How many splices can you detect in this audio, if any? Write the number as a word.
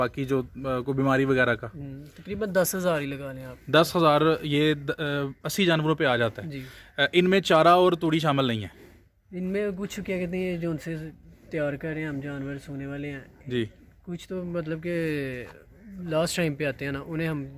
zero